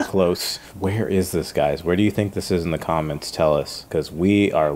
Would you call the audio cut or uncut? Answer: cut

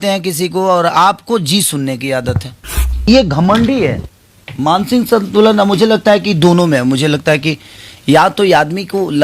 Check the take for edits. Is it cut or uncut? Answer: cut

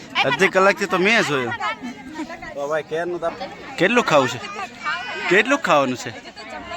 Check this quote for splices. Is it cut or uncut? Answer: cut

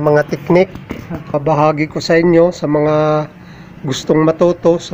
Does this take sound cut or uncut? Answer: cut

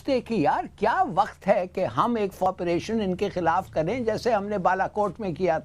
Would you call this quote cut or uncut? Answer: cut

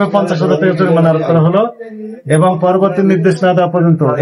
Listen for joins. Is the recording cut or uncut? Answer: uncut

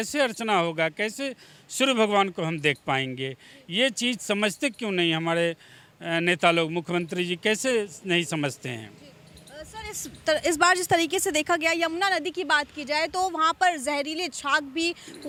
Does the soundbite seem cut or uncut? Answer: uncut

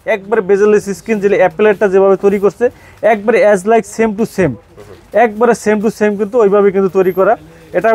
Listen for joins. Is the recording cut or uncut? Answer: uncut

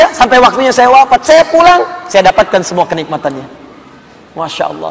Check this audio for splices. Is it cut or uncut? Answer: uncut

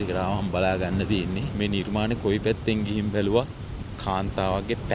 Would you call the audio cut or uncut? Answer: cut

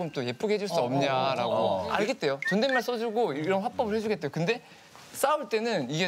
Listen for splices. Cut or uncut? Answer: cut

